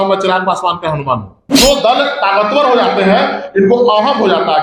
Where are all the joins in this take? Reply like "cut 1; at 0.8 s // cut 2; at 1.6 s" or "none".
cut 1; at 1.4 s